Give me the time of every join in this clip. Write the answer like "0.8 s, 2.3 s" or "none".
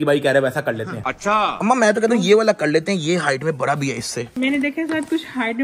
1.2 s, 4.3 s